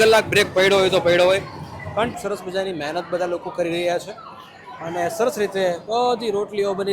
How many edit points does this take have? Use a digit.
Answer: 1